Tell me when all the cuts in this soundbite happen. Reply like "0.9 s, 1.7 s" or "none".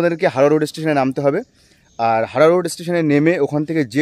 none